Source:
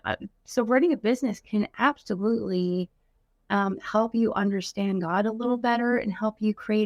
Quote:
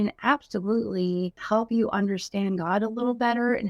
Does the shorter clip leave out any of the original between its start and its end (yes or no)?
yes